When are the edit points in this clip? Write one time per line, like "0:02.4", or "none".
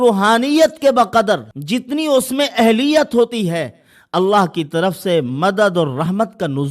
0:01.5